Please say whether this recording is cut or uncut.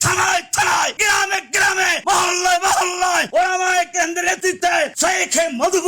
cut